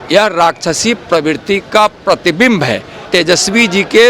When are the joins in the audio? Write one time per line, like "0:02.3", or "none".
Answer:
0:03.0